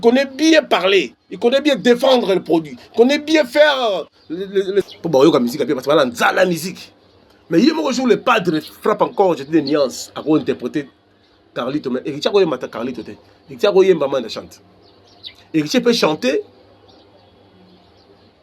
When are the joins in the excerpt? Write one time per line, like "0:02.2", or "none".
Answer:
0:04.8

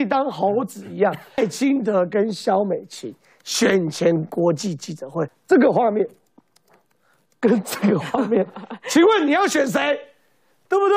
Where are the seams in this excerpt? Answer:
0:01.4
0:05.4

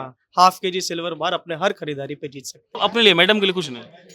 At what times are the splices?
0:02.6

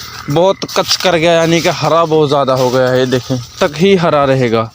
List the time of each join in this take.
0:03.5

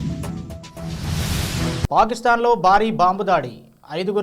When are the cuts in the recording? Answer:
0:01.9

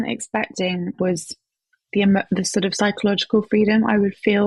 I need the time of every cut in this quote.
0:00.9

